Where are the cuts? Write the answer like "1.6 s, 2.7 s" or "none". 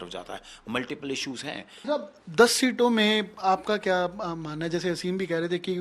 1.8 s